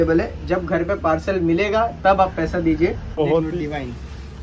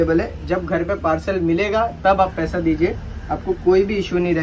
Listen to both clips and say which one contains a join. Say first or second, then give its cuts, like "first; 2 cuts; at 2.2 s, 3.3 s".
first; 1 cut; at 3.2 s